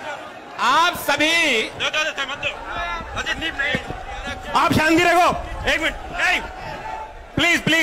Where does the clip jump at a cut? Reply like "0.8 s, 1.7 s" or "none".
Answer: none

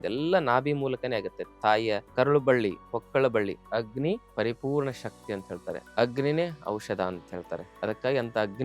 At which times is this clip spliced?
2.1 s, 3.7 s, 5.8 s, 7.6 s

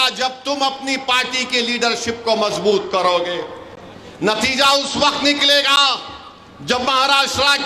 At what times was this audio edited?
none

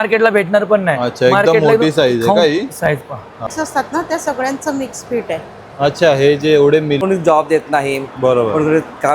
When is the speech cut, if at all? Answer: 3.5 s, 7.0 s

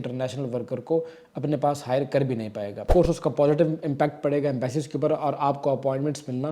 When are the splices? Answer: 2.8 s

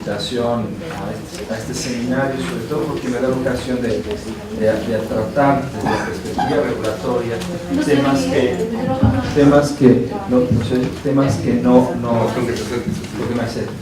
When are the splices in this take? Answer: 1.6 s

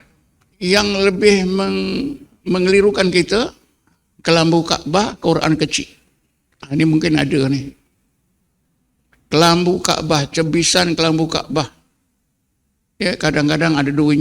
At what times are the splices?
none

